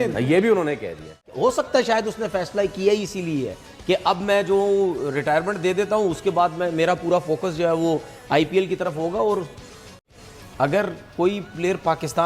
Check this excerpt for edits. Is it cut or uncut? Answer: cut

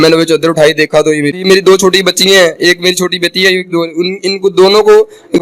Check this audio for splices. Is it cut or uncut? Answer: cut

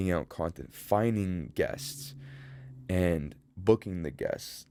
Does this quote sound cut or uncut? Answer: uncut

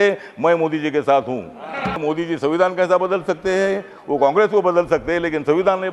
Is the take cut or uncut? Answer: cut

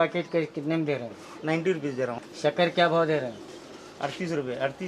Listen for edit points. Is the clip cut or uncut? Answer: cut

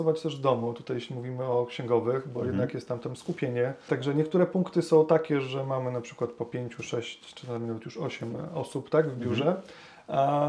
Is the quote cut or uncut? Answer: cut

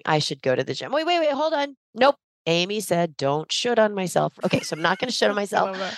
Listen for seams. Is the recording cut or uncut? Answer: cut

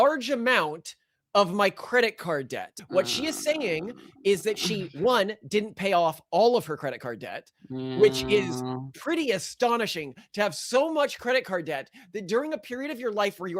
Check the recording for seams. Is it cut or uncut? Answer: cut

